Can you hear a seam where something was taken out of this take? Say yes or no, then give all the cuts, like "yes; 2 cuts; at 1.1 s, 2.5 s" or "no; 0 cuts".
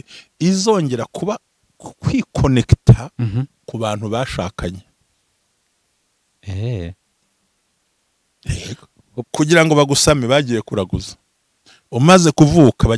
yes; 1 cut; at 9.2 s